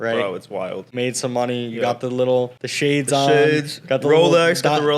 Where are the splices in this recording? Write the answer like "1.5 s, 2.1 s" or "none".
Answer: 0.9 s, 2.6 s